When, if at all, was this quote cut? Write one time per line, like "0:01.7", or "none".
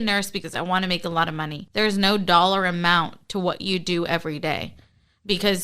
0:01.6